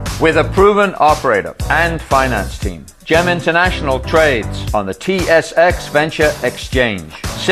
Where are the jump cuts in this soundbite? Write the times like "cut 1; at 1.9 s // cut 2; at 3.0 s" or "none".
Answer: none